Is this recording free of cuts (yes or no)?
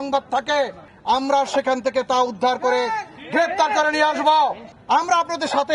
no